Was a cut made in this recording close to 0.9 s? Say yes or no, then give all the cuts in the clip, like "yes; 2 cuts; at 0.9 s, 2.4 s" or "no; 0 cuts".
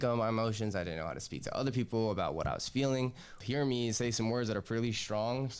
no; 1 cut; at 3.4 s